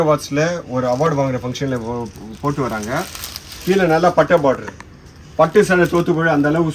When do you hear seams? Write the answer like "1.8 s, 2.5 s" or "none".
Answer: none